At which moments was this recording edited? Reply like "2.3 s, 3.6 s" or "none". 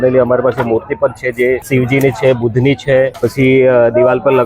1.6 s, 3.1 s